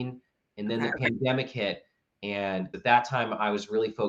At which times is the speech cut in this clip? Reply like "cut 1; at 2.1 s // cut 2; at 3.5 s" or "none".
cut 1; at 2.7 s

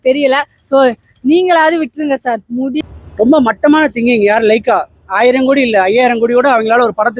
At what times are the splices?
cut 1; at 2.8 s

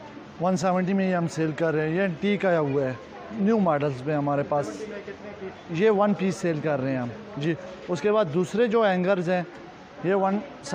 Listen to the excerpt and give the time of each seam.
none

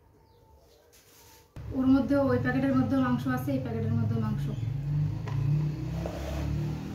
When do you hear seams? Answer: cut 1; at 1.6 s

